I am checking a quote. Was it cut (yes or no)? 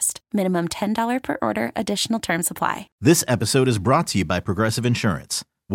yes